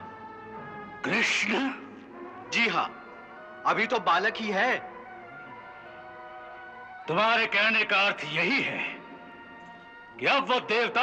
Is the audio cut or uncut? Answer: uncut